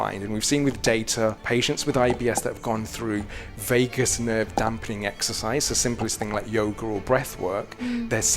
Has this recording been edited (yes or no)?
yes